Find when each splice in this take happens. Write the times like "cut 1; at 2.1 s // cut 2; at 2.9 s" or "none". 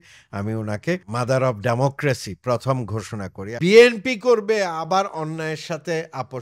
cut 1; at 3.5 s